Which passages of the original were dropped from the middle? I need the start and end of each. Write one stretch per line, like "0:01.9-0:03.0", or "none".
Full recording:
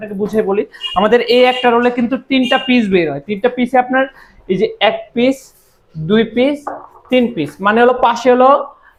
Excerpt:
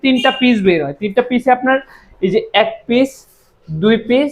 none